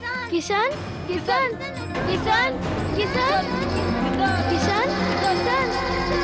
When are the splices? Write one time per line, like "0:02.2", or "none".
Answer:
0:03.6